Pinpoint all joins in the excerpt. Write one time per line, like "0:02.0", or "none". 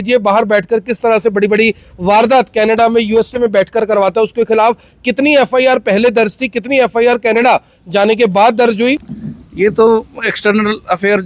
0:09.0